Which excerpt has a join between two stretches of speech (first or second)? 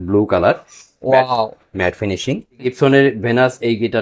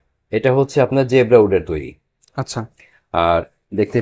first